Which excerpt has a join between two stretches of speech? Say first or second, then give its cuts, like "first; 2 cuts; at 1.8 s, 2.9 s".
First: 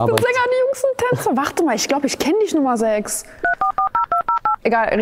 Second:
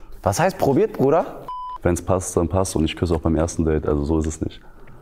second; 2 cuts; at 1.5 s, 3.9 s